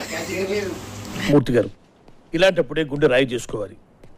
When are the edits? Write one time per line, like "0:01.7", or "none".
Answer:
none